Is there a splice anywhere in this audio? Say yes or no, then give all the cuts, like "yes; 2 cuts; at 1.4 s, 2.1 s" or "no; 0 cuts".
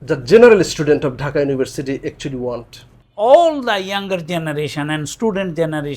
yes; 1 cut; at 3.0 s